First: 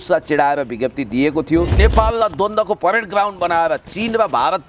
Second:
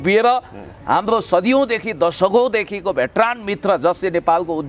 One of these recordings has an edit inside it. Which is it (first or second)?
first